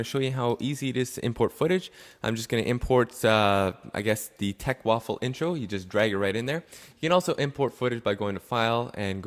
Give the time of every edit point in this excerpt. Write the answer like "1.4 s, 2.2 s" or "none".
5.6 s